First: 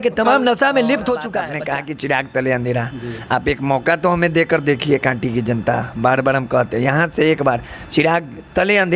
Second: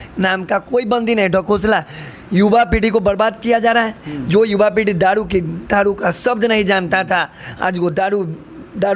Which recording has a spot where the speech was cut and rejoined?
first; 1 cut; at 1.5 s

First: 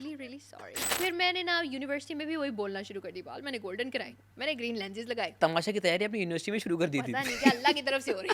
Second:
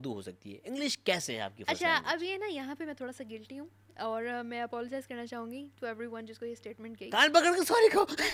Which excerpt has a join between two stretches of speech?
first; 3 cuts; at 0.9 s, 4.2 s, 5.4 s

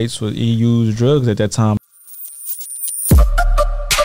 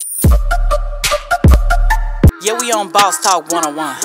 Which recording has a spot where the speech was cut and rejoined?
first; 1 cut; at 1.8 s

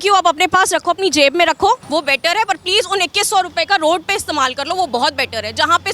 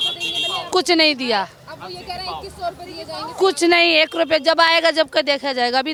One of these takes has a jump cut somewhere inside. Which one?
first; 1 cut; at 1.8 s

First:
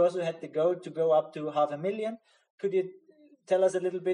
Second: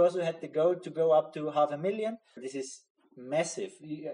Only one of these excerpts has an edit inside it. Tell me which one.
second; 1 cut; at 2.4 s

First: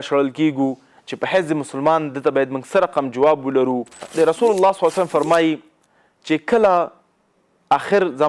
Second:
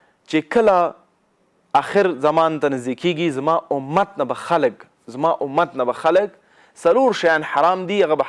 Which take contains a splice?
first; 1 cut; at 4.0 s

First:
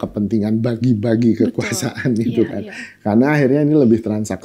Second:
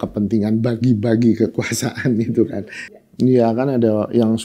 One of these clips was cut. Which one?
second; 1 cut; at 2.9 s

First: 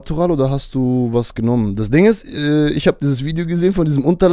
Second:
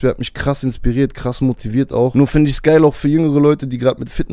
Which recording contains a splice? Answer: second; 1 cut; at 2.1 s

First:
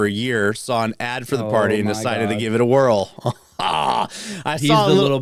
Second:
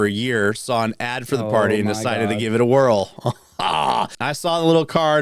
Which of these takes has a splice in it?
second; 1 cut; at 4.2 s

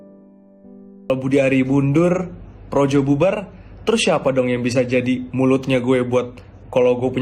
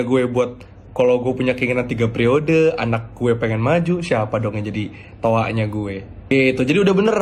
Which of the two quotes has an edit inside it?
first; 1 cut; at 1.1 s

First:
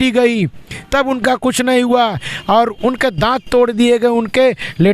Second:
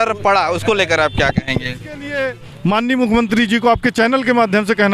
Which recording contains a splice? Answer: second; 1 cut; at 2.1 s

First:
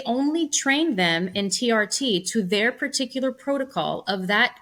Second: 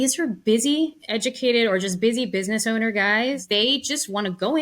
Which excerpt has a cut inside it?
second; 2 cuts; at 1.0 s, 3.4 s

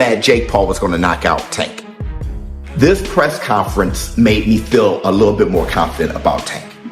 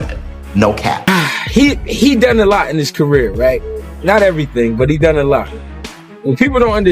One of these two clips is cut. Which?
second; 1 cut; at 1.1 s

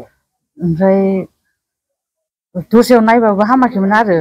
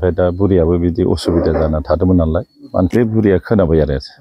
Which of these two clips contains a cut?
second; 1 cut; at 2.9 s

